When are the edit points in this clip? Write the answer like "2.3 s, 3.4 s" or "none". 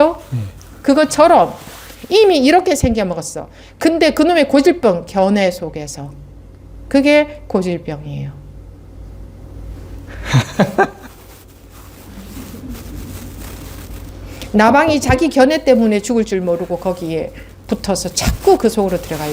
14.1 s